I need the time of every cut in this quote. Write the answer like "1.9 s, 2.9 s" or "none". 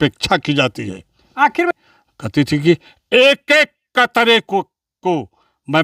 1.7 s

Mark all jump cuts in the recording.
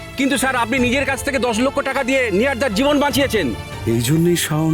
3.7 s

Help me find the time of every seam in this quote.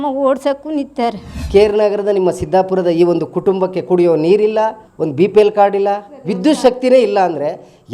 1.3 s

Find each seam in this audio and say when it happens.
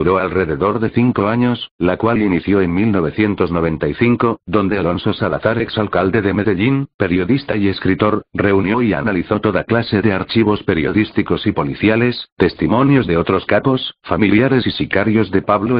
7.4 s

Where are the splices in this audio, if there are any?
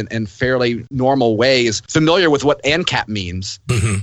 0.9 s, 1.8 s

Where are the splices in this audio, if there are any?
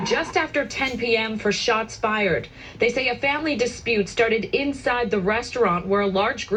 none

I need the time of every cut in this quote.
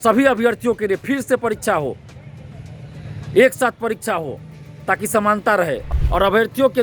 5.9 s

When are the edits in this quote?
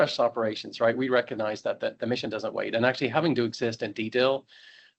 none

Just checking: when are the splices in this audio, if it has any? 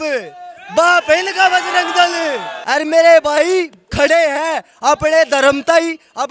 2.5 s

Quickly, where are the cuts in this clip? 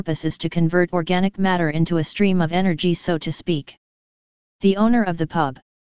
2.1 s

